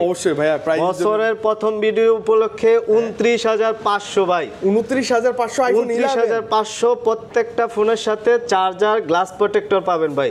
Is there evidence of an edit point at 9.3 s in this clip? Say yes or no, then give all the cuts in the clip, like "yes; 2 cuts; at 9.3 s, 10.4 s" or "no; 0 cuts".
no; 0 cuts